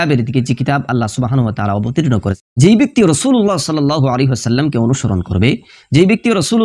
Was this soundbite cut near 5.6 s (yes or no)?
no